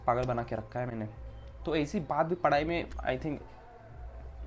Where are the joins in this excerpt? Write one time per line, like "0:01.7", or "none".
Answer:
none